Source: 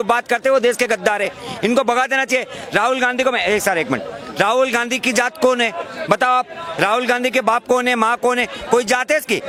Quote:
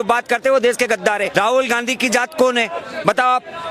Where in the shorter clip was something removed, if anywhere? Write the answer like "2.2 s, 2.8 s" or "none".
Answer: 1.3 s

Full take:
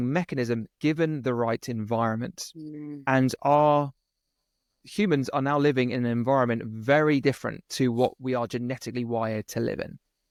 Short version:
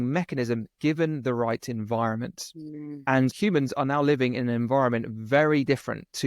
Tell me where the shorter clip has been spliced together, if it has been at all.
3.3 s

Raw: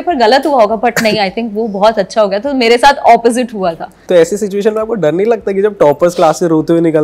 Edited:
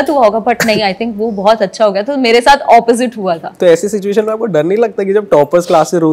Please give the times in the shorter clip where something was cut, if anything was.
3.5 s

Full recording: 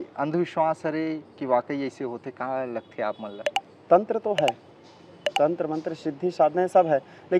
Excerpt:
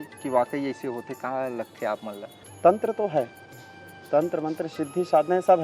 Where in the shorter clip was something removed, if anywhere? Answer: 2.3 s

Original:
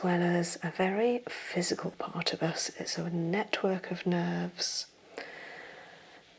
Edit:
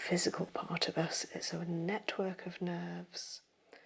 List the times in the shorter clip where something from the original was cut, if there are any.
none

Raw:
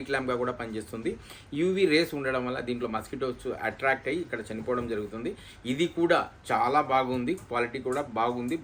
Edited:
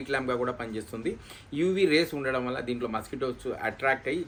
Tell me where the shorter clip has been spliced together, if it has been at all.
none

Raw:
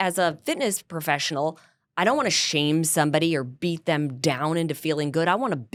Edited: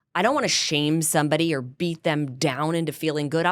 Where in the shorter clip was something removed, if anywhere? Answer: none

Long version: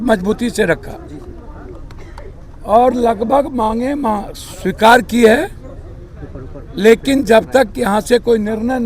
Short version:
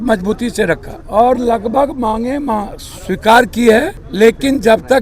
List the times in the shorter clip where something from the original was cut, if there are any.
0.9 s, 4.0 s

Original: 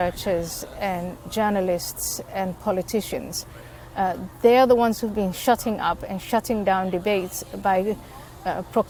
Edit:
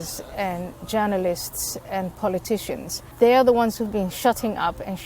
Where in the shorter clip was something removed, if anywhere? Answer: 3.0 s

